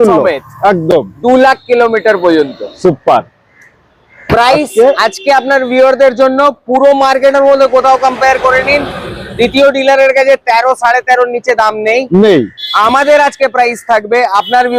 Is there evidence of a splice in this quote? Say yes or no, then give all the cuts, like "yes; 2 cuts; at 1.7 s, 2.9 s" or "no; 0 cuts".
no; 0 cuts